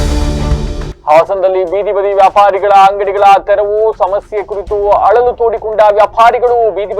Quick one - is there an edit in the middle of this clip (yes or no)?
no